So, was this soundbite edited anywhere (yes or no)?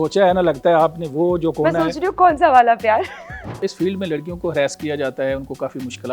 yes